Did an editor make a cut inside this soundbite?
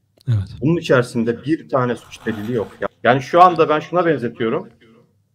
yes; 1 cut; at 2.8 s

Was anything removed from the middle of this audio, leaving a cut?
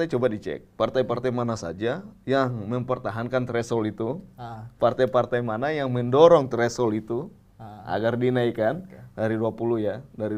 no; 0 cuts

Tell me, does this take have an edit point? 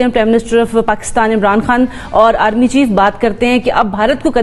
no; 0 cuts

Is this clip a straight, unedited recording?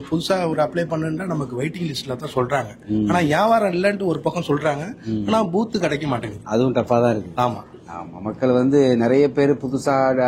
yes; 0 cuts

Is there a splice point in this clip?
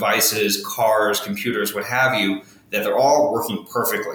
no; 0 cuts

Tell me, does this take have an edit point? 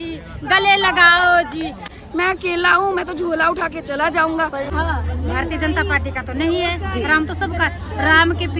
yes; 2 cuts; at 1.9 s, 4.7 s

